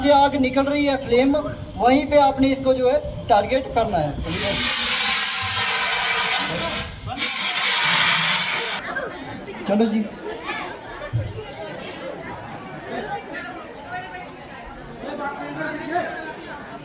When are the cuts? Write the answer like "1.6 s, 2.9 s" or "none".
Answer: 8.8 s